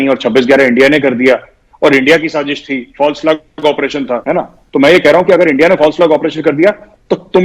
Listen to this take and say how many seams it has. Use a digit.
1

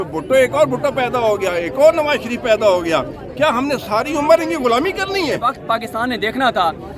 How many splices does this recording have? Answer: 1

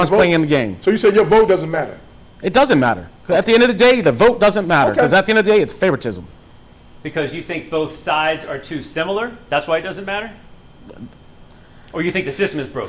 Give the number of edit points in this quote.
0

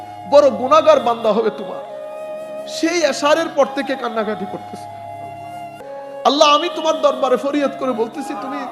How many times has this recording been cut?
0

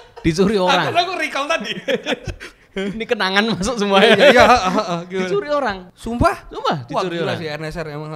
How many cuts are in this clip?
1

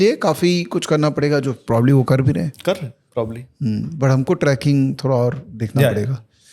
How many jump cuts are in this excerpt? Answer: 0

